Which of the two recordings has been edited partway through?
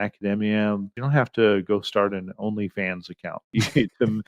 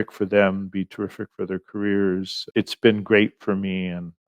first; 2 cuts; at 0.9 s, 3.5 s

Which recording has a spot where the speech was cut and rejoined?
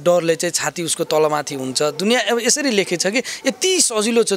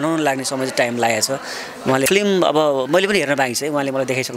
second; 1 cut; at 2.1 s

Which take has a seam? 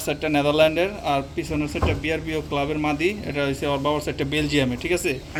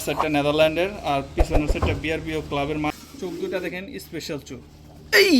second; 1 cut; at 2.9 s

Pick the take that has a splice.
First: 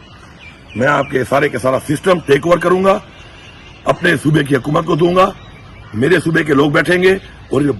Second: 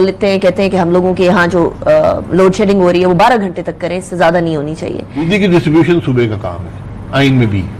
second; 1 cut; at 5.2 s

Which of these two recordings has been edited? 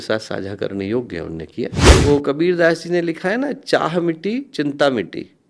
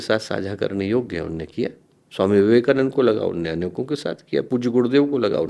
first; 1 cut; at 1.8 s

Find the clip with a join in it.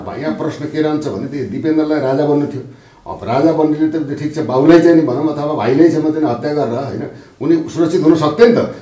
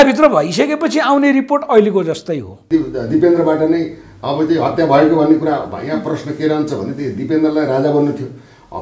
second; 1 cut; at 2.7 s

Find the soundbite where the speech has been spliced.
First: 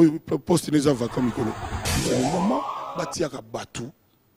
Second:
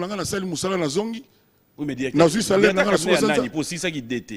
first; 1 cut; at 1.9 s

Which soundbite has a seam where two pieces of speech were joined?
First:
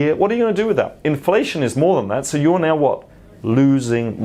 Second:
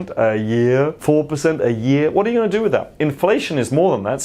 second; 1 cut; at 1.0 s

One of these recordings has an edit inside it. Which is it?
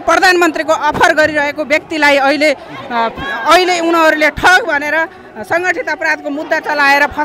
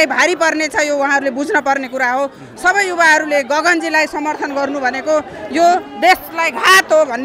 second; 1 cut; at 2.5 s

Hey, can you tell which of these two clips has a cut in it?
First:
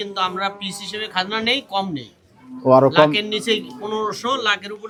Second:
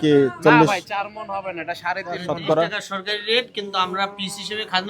second; 1 cut; at 2.3 s

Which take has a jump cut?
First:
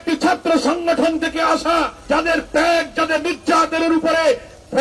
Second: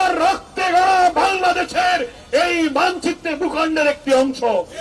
first; 1 cut; at 2.0 s

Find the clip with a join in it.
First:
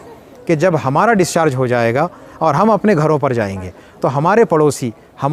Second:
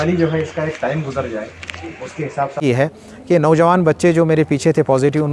second; 1 cut; at 2.5 s

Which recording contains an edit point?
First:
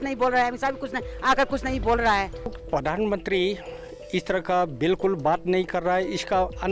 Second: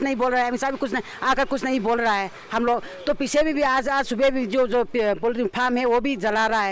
first; 1 cut; at 2.5 s

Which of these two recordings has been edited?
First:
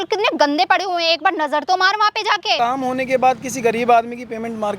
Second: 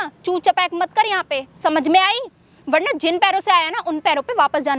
first; 1 cut; at 2.6 s

